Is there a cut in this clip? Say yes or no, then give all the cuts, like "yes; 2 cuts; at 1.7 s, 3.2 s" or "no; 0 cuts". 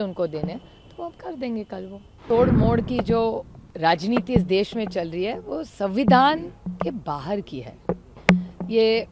yes; 1 cut; at 2.2 s